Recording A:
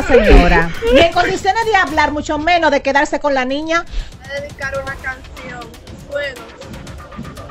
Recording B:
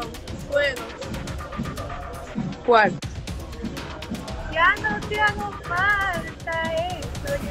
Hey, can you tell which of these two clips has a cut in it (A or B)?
A